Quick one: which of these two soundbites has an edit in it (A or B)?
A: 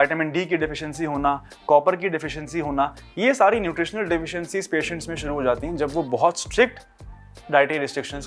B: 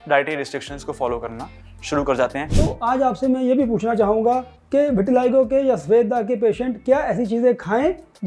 B